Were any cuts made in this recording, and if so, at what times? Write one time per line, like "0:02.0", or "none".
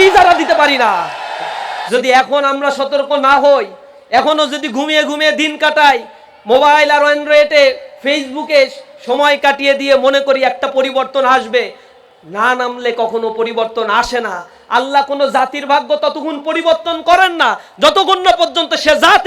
0:01.8